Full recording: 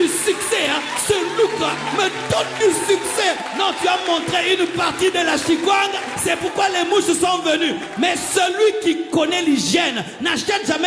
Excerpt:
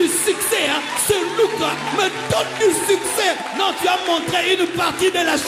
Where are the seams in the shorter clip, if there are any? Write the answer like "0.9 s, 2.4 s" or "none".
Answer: none